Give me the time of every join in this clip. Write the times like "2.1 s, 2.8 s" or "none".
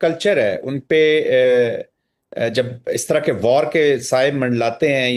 none